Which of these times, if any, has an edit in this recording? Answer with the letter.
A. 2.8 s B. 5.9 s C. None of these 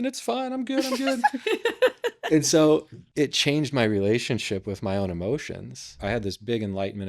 B